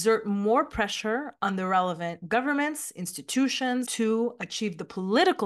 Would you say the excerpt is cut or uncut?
cut